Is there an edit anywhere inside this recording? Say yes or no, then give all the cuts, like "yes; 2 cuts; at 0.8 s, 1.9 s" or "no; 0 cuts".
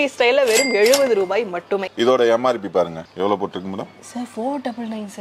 yes; 1 cut; at 1.9 s